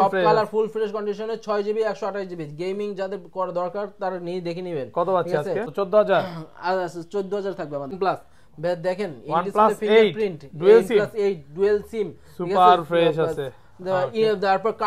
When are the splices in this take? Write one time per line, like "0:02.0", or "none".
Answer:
0:05.7
0:07.9